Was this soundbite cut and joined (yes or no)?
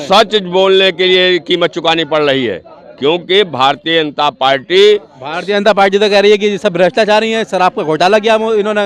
no